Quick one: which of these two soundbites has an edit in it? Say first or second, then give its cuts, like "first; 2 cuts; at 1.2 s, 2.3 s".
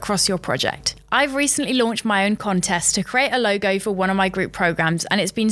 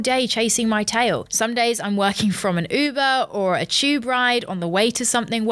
second; 1 cut; at 1.3 s